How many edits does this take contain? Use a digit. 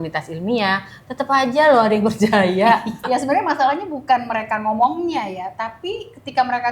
1